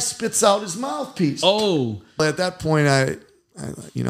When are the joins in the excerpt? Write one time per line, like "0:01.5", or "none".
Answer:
0:02.2